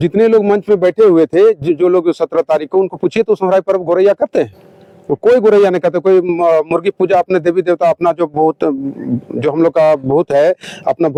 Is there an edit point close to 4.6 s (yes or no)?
no